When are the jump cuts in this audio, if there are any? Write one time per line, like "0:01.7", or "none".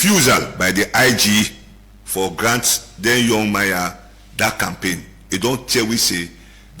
0:01.6